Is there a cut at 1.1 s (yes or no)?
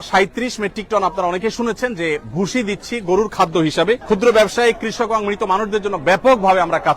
no